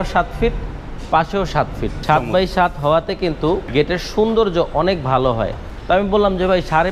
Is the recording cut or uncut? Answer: cut